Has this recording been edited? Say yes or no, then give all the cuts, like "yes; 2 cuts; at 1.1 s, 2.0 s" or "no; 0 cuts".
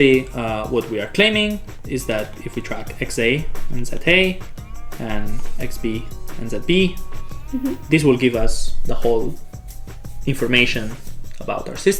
no; 0 cuts